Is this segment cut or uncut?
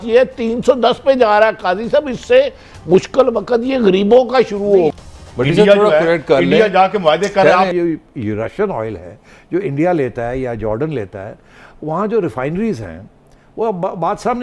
cut